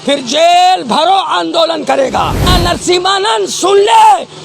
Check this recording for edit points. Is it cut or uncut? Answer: cut